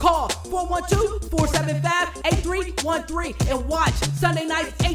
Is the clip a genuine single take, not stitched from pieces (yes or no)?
yes